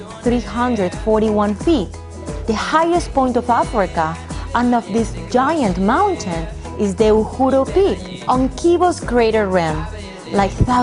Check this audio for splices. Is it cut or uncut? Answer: uncut